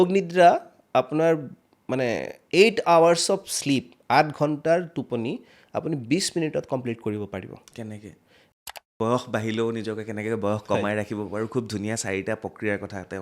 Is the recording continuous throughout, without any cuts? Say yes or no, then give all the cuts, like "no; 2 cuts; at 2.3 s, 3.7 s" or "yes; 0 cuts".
no; 1 cut; at 8.5 s